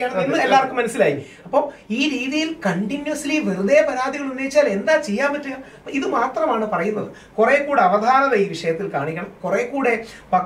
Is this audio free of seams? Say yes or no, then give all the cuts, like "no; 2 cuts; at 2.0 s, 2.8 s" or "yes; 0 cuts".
yes; 0 cuts